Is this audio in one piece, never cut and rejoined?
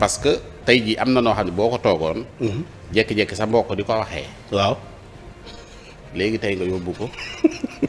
yes; 0 cuts

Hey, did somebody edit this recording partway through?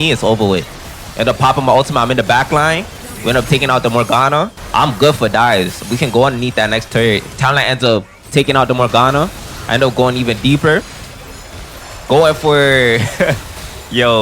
yes; 1 cut; at 4.6 s

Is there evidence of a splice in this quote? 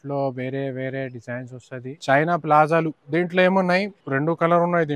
yes; 3 cuts; at 2.0 s, 3.0 s, 4.0 s

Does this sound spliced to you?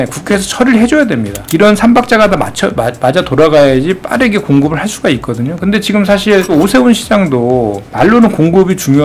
yes; 2 cuts; at 1.3 s, 6.5 s

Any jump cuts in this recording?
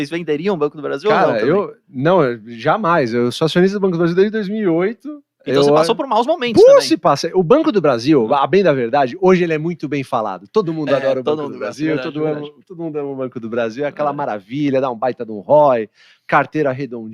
no; 0 cuts

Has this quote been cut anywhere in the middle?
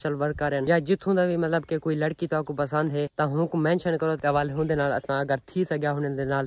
yes; 1 cut; at 4.2 s

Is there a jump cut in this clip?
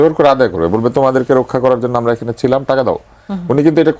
no; 0 cuts

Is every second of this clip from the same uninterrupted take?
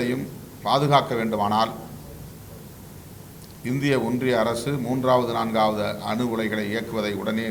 yes; 0 cuts

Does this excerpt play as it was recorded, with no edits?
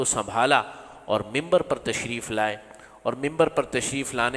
yes; 0 cuts

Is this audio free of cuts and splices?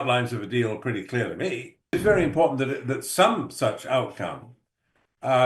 no; 1 cut; at 1.9 s

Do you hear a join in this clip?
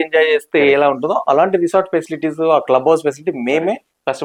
no; 0 cuts

